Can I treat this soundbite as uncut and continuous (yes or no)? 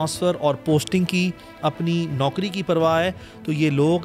yes